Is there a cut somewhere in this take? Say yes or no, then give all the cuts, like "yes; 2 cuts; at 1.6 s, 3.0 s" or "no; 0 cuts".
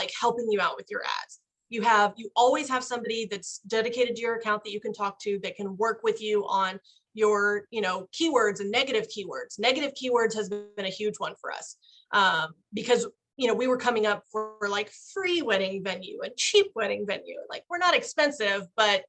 no; 0 cuts